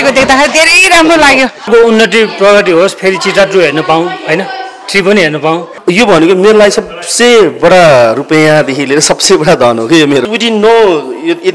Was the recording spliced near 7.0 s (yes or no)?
no